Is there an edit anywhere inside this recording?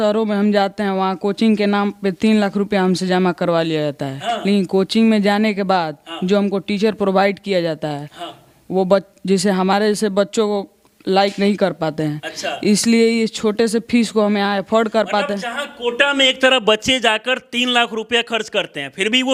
no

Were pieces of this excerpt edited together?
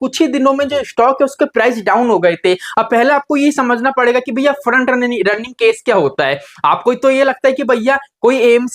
yes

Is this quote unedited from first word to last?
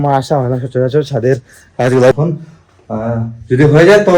no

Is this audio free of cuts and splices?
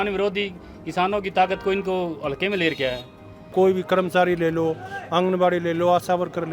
no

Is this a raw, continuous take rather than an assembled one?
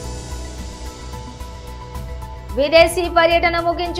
no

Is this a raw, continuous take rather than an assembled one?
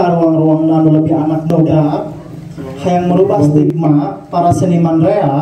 no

